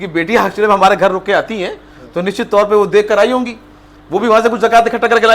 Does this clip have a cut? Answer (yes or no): no